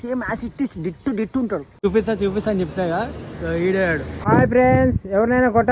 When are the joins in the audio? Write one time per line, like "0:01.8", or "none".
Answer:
0:01.8